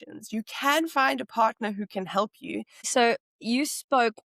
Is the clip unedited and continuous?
no; 1 cut; at 2.8 s

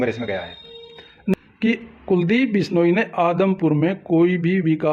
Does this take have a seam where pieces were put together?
yes; 1 cut; at 1.4 s

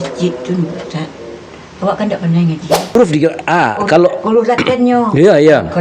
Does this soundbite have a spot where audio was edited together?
yes; 1 cut; at 3.0 s

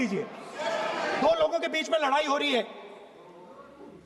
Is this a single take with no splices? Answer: no; 1 cut; at 1.2 s

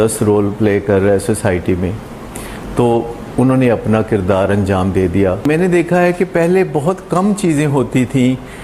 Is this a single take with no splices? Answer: no; 1 cut; at 5.4 s

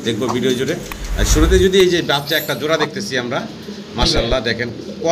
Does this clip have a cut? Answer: no; 0 cuts

